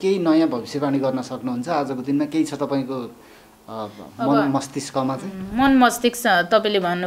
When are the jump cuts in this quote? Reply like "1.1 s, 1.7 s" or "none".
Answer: none